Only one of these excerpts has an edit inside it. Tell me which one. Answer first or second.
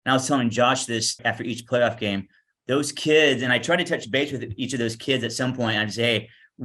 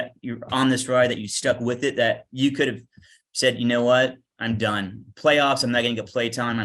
first